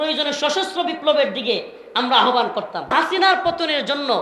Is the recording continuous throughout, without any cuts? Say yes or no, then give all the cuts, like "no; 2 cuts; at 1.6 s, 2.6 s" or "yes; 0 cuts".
no; 1 cut; at 2.9 s